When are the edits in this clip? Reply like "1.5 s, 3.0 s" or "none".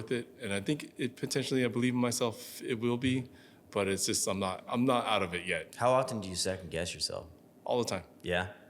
4.6 s